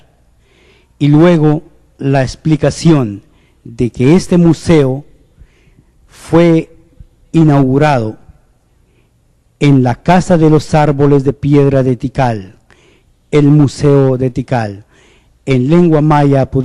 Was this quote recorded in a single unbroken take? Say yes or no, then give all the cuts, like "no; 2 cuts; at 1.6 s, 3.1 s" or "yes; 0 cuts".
no; 1 cut; at 1.5 s